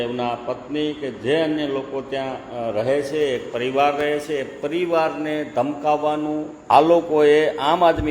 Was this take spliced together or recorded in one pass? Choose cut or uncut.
cut